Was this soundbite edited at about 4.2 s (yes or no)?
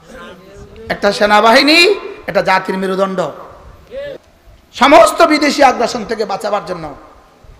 yes